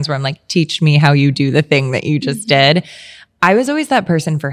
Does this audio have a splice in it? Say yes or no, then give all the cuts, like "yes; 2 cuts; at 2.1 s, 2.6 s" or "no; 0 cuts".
no; 0 cuts